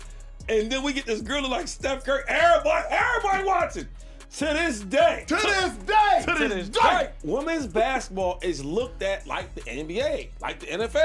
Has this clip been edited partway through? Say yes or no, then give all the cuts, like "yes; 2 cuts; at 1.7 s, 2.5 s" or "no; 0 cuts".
yes; 1 cut; at 8.6 s